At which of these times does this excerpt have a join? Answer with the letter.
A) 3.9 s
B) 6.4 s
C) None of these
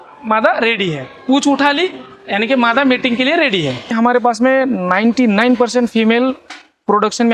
A